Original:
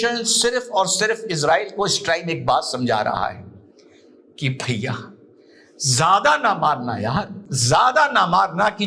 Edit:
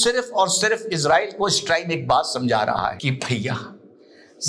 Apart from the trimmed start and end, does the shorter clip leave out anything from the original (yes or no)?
yes